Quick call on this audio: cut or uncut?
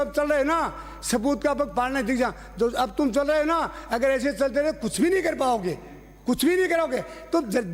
uncut